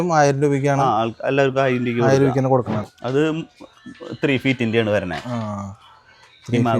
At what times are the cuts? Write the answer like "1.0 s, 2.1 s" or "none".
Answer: 2.8 s